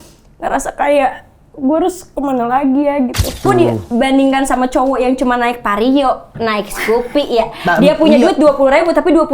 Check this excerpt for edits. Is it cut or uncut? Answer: cut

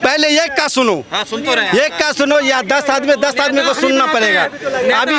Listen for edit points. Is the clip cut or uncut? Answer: uncut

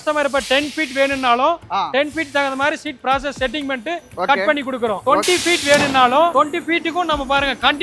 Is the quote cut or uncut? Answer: cut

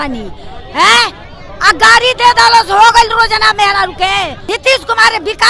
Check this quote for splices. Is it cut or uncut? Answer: cut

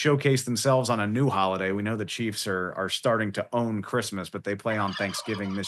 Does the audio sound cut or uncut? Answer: uncut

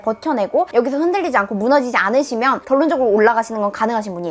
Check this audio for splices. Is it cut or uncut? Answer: uncut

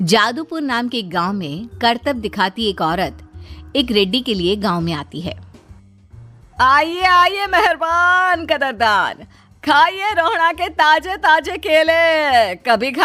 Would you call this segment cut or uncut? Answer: uncut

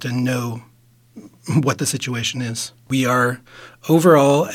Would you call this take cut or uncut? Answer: cut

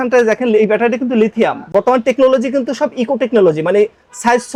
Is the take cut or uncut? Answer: uncut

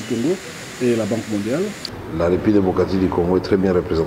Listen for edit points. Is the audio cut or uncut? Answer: cut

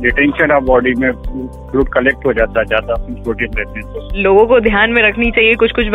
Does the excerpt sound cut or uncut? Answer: cut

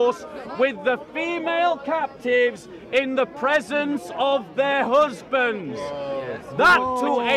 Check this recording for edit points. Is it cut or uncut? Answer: uncut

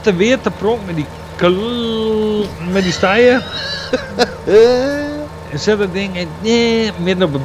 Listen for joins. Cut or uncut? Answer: uncut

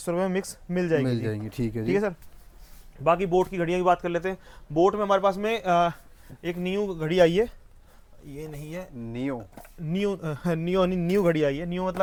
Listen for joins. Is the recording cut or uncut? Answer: uncut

